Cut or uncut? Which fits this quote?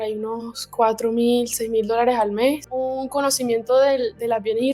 cut